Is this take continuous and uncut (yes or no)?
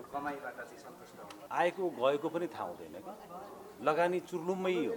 no